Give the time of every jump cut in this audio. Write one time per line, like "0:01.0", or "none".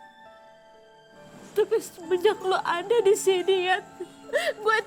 none

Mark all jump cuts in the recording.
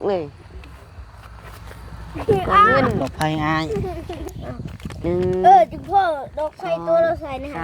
0:03.0

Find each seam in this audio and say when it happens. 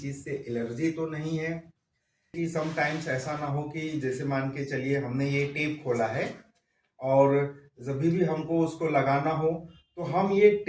0:02.3

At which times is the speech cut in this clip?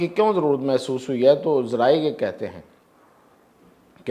none

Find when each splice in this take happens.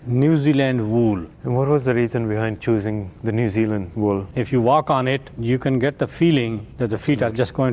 0:01.3
0:03.1
0:04.2
0:05.3
0:06.7

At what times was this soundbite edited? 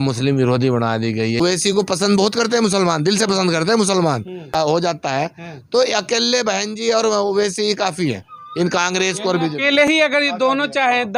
0:01.4
0:04.5
0:09.9

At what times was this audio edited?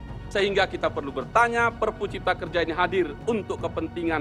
none

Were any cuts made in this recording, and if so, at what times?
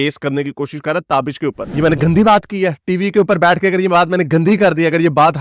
0:01.6

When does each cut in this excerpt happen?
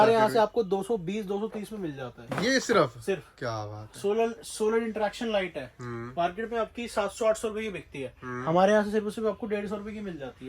none

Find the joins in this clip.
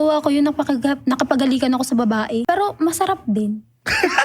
0:02.4

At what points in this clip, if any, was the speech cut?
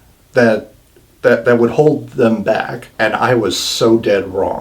0:02.8

